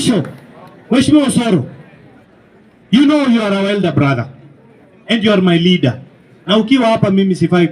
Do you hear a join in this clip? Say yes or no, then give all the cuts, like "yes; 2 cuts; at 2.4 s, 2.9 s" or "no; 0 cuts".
no; 0 cuts